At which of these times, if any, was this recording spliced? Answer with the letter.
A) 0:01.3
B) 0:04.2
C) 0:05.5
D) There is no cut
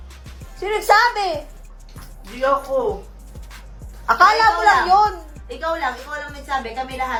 D